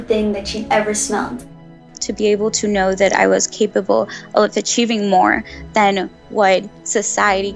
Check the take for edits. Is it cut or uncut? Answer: cut